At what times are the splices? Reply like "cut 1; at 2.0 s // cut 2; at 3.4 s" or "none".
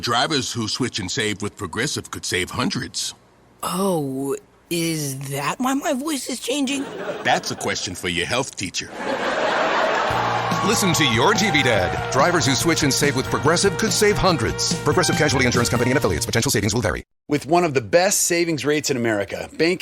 cut 1; at 17.1 s